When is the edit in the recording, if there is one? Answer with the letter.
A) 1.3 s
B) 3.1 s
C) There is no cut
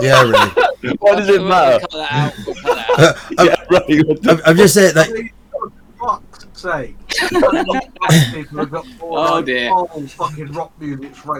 C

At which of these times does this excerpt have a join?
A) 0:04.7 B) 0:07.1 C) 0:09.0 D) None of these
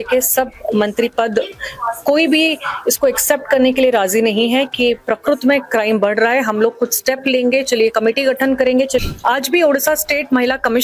C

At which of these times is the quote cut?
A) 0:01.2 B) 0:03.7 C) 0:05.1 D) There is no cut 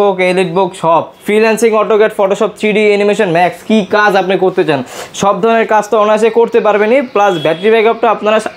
A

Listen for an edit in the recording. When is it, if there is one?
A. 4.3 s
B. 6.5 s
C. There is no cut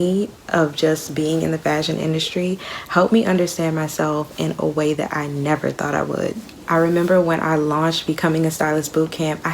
B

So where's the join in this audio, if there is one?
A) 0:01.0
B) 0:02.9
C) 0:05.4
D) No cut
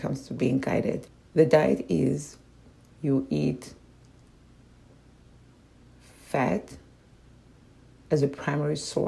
A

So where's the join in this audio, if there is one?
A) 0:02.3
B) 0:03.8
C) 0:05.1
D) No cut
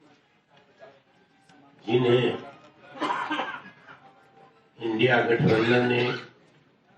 C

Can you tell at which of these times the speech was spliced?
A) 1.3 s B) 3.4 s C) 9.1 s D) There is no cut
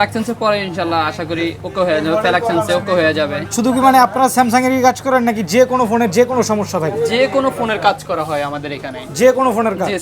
B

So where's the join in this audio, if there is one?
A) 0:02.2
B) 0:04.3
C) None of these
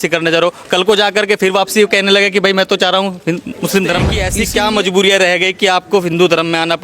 B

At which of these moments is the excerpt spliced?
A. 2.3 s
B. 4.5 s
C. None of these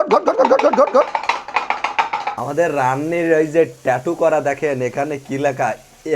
C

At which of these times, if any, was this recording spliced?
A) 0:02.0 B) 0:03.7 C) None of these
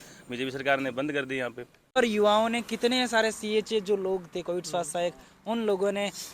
A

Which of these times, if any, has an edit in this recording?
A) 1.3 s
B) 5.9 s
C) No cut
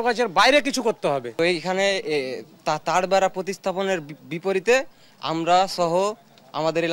A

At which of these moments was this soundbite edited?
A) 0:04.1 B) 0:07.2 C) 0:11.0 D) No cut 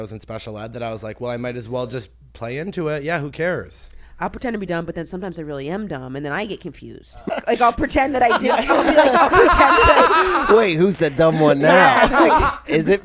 B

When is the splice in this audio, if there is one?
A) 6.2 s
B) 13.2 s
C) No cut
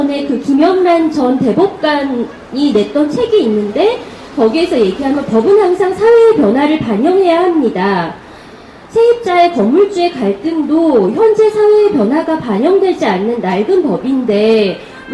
B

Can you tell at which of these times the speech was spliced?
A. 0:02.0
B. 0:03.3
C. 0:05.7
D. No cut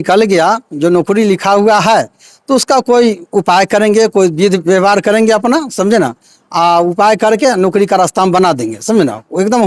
D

